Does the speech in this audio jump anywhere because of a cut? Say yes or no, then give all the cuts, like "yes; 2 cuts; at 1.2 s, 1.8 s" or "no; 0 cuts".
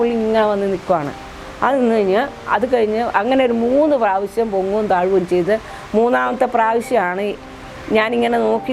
no; 0 cuts